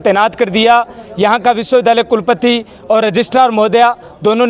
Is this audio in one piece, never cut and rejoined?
yes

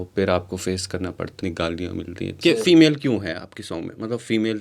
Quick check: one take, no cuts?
no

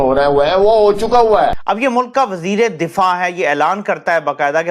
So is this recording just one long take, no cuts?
no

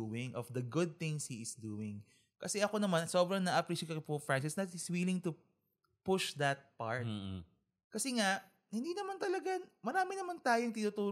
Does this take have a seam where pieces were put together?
no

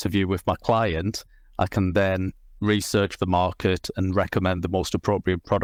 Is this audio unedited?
yes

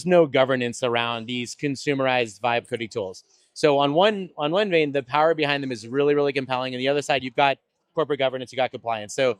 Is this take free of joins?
yes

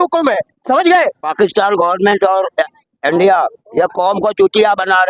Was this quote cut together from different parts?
yes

